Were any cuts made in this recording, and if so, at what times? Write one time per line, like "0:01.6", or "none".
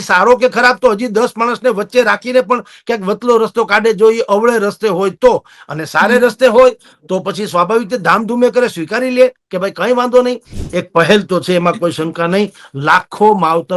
0:10.6